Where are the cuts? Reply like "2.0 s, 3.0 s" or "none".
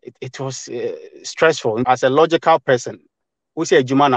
1.9 s